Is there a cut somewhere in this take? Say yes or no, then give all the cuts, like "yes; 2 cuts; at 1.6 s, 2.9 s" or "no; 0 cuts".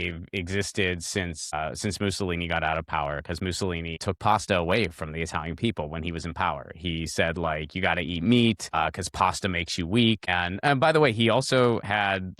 yes; 4 cuts; at 1.5 s, 4.0 s, 8.8 s, 10.3 s